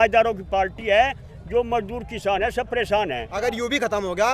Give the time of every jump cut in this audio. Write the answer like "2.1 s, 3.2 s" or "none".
3.0 s